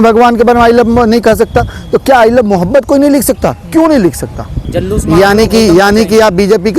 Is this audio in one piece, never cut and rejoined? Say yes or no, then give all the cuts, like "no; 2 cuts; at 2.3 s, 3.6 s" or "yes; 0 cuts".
no; 1 cut; at 4.7 s